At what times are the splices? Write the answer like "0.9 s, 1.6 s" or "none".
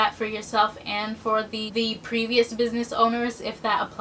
1.7 s